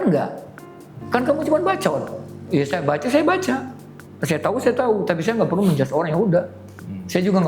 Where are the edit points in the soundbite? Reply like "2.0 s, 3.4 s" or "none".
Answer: none